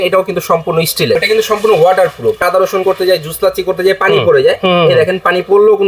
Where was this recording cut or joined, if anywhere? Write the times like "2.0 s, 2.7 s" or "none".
1.2 s, 2.4 s